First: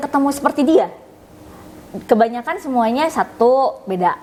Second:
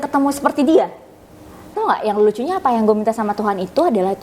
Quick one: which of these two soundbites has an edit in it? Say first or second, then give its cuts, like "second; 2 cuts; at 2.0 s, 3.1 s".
second; 1 cut; at 1.7 s